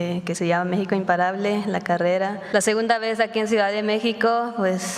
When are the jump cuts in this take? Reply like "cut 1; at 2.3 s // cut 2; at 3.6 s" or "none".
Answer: cut 1; at 2.4 s